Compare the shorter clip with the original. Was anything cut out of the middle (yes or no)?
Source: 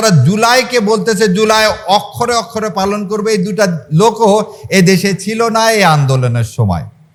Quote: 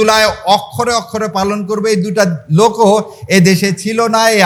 no